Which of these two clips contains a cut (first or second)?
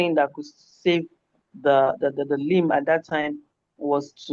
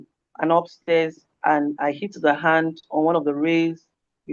second